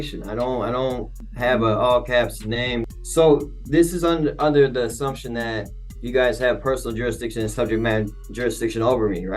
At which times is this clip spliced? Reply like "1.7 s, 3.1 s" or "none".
1.2 s, 2.9 s